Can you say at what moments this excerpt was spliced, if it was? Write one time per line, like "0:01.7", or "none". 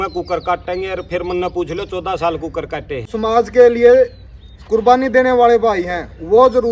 0:03.1